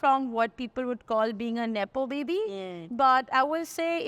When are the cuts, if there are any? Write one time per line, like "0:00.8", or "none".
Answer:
none